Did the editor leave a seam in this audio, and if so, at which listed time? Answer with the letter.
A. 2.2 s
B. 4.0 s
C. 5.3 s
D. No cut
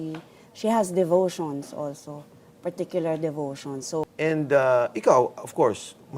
B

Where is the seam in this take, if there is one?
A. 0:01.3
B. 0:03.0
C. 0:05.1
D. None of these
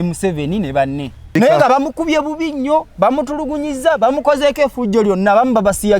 A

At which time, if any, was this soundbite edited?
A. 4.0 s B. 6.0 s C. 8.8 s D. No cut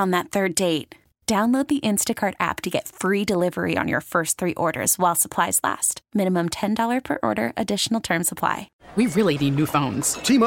C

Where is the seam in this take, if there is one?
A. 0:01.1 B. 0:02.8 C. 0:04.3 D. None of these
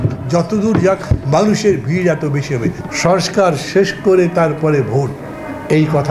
B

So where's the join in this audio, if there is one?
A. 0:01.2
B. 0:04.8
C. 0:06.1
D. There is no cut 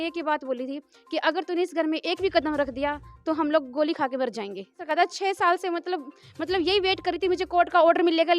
B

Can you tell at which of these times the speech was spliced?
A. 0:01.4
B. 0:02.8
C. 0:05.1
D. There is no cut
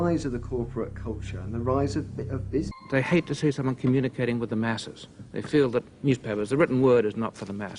D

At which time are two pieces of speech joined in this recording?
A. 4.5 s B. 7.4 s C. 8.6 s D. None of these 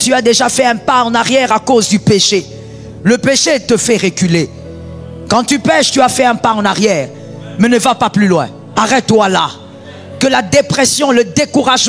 C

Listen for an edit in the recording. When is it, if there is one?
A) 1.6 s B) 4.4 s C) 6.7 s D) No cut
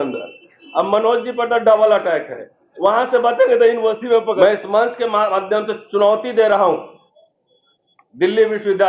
B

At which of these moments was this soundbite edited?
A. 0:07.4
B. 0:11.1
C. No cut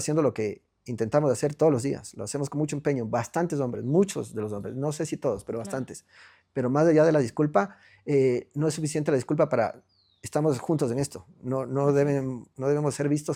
C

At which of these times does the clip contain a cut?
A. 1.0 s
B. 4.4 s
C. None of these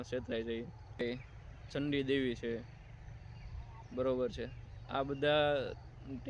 A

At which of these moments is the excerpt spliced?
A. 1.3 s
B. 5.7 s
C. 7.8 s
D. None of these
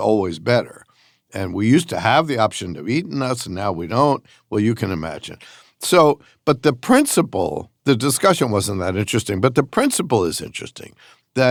D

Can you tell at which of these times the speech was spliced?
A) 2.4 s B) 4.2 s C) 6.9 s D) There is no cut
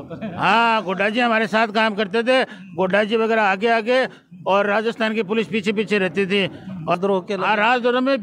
C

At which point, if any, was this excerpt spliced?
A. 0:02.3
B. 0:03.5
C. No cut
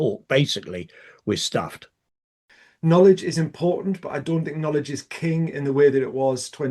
A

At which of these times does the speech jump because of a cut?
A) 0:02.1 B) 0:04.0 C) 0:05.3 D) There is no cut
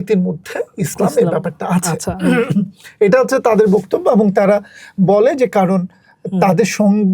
D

